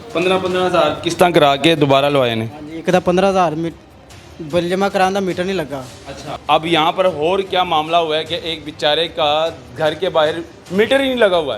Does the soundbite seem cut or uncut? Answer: cut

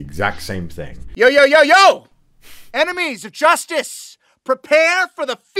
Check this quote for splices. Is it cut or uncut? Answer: uncut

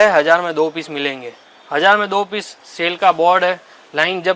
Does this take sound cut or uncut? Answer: uncut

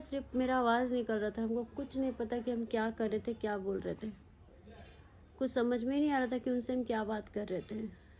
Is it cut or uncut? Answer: uncut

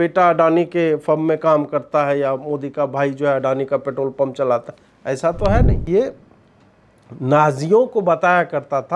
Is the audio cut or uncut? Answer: cut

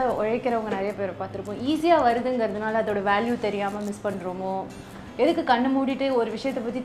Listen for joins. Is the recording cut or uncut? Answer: uncut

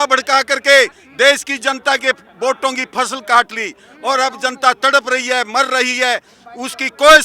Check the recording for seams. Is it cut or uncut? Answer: uncut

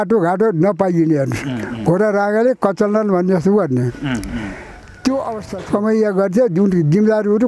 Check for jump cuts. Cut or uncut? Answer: cut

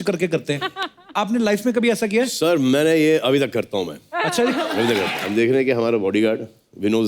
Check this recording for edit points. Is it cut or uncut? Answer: cut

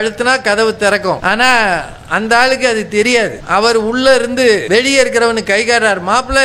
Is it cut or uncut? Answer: cut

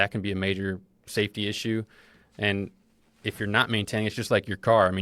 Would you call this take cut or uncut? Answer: uncut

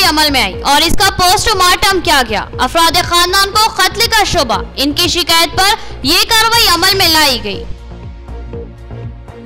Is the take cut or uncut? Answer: uncut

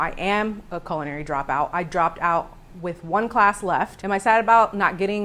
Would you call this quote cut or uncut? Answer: cut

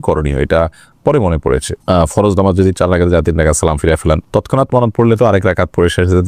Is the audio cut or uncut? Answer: uncut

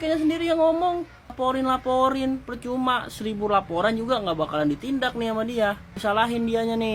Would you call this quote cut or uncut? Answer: uncut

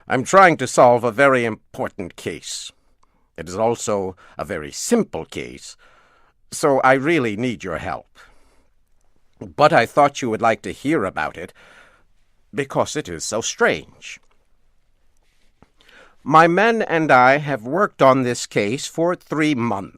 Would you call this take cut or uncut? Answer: cut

